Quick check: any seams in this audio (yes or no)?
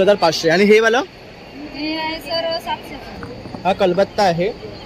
yes